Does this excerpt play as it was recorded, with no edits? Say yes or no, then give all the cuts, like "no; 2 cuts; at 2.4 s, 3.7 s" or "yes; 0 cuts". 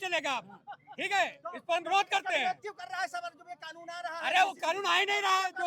yes; 0 cuts